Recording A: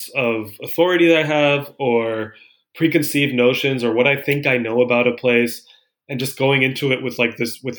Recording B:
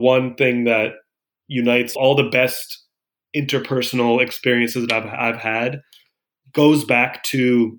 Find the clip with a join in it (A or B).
B